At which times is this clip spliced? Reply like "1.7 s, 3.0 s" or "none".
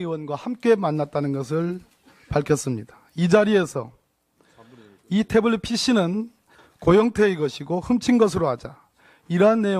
6.9 s